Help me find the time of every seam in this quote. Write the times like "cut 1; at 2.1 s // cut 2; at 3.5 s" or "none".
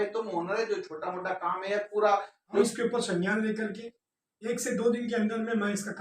cut 1; at 2.6 s